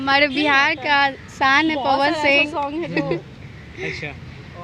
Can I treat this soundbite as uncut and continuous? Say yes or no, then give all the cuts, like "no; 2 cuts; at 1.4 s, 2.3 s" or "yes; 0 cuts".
yes; 0 cuts